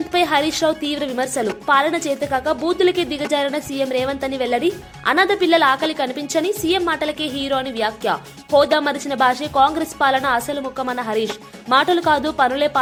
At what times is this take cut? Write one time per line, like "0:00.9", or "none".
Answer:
none